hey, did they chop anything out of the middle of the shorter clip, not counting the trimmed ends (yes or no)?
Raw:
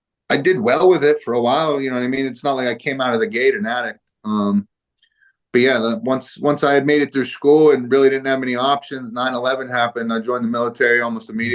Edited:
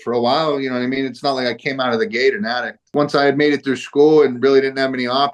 yes